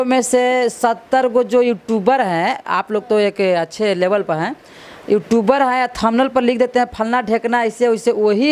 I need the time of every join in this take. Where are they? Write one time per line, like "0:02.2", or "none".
none